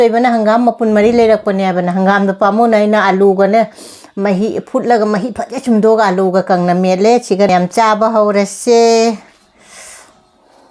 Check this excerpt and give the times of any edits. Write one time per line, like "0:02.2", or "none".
0:07.5